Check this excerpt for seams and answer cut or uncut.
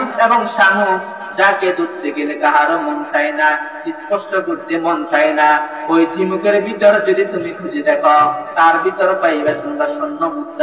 uncut